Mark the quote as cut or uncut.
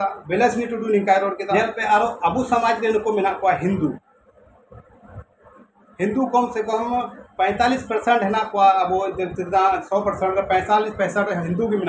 cut